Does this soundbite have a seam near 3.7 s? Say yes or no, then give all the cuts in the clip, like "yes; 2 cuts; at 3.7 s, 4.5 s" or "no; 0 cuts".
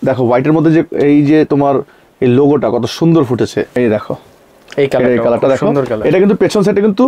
yes; 1 cut; at 3.7 s